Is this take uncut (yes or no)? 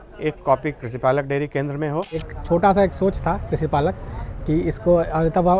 no